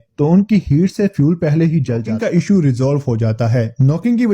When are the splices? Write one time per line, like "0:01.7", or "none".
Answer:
0:02.1